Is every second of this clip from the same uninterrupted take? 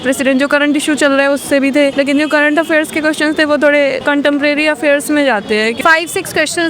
no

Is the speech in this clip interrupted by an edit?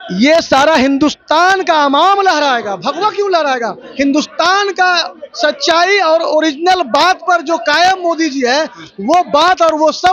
no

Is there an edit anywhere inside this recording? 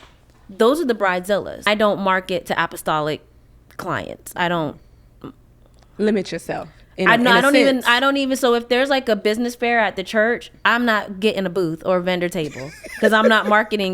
yes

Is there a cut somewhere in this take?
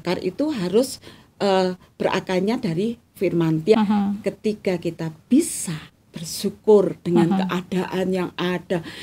yes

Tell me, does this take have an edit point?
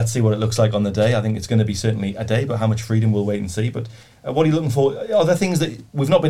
no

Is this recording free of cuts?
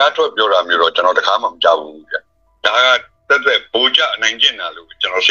no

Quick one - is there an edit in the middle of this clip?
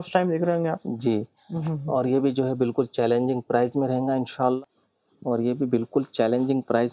yes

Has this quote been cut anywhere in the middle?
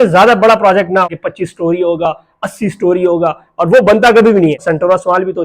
yes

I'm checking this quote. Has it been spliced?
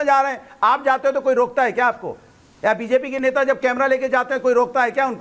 no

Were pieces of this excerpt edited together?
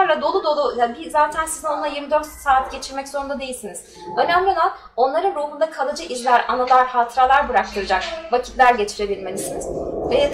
no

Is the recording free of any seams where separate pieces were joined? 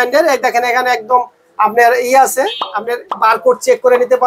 yes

